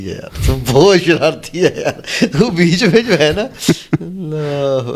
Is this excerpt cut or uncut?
uncut